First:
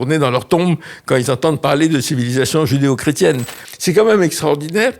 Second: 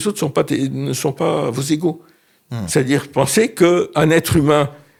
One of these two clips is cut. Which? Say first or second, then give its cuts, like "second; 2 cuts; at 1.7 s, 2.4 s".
first; 1 cut; at 3.6 s